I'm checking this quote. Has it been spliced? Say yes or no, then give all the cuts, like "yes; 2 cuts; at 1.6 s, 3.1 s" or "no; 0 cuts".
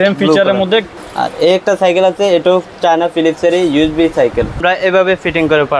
yes; 2 cuts; at 1.0 s, 4.6 s